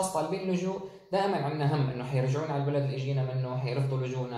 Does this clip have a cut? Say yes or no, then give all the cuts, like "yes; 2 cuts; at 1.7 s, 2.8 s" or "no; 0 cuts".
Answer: no; 0 cuts